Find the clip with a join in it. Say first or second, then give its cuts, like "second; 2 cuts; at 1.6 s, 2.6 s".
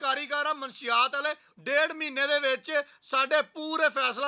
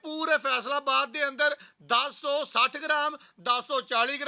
first; 1 cut; at 1.5 s